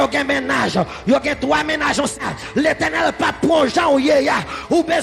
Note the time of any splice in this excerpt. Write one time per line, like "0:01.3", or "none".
0:02.2